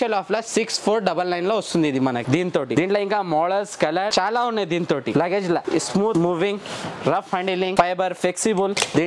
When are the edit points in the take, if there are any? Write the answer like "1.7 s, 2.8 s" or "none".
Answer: none